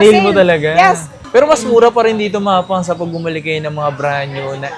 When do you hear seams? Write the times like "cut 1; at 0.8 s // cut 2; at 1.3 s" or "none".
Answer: cut 1; at 1.1 s